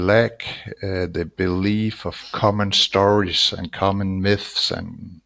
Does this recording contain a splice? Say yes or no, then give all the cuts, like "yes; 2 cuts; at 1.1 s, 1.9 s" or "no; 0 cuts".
no; 0 cuts